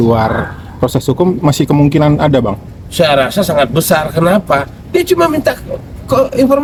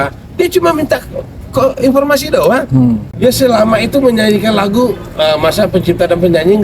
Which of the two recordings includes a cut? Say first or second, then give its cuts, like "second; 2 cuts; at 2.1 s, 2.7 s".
second; 1 cut; at 3.1 s